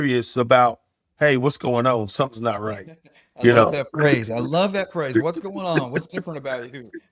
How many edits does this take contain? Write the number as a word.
zero